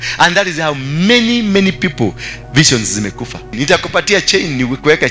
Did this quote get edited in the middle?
yes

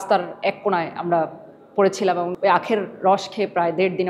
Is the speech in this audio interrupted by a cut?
yes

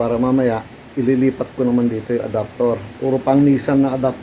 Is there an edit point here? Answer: no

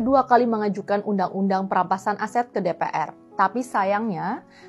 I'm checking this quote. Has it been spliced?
no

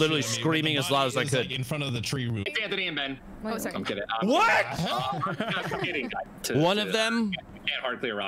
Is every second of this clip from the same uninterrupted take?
no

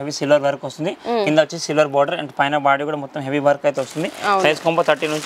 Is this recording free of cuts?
yes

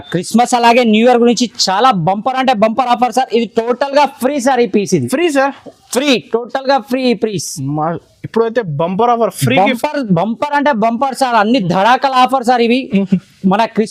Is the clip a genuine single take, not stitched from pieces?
yes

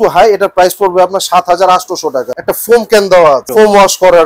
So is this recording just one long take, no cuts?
no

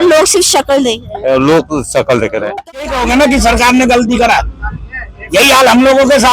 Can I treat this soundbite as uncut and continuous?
no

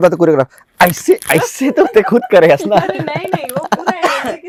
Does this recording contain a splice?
no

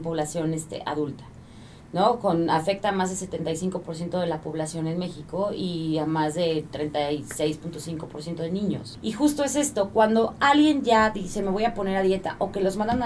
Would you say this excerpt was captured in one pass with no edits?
no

